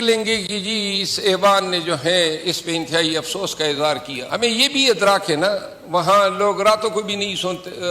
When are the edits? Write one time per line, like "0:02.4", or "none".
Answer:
0:04.1